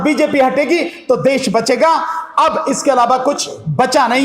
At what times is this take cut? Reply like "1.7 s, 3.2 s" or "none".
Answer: none